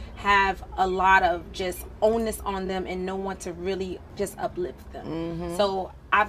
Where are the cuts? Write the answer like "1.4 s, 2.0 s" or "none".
5.3 s